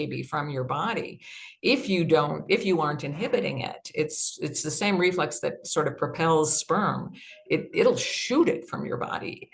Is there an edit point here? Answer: no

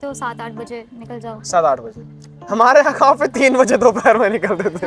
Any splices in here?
no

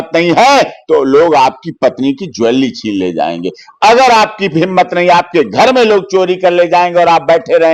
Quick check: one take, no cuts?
yes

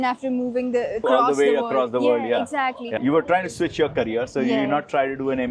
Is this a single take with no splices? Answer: no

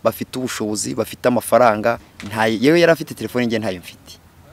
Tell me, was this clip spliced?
yes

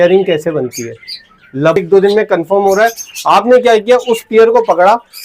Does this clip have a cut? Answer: yes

